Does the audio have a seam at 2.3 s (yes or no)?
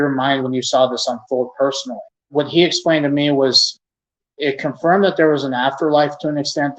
yes